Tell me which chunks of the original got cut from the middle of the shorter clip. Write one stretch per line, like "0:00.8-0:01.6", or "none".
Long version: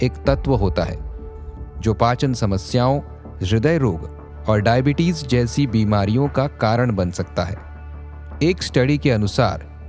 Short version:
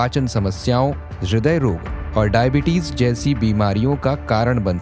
0:03.2-0:03.3
0:04.1-0:04.3